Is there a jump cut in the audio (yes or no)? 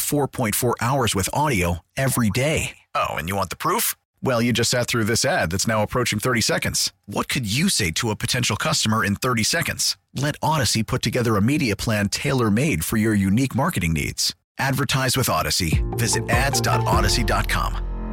no